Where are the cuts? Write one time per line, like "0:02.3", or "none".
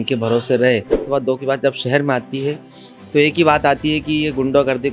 0:01.0